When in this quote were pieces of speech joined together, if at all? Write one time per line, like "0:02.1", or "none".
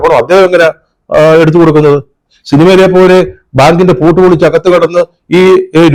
none